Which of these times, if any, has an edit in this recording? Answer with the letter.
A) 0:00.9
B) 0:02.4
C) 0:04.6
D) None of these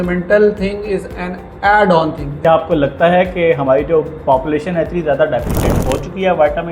B